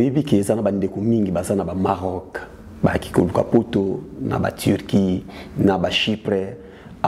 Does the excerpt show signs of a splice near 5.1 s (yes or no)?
no